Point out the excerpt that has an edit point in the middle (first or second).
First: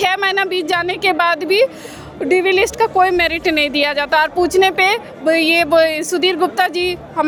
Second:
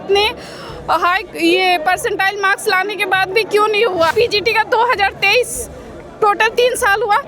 second